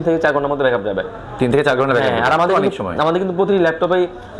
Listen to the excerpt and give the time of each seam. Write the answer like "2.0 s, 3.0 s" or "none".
none